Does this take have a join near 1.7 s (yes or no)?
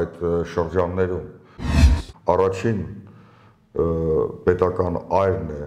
yes